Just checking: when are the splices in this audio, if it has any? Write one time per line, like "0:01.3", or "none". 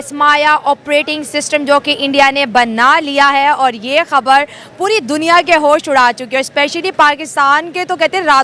none